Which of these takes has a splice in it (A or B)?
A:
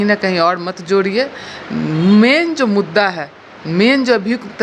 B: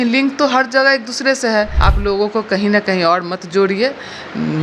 B